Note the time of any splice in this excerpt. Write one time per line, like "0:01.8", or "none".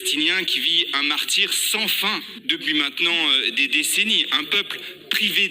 0:02.4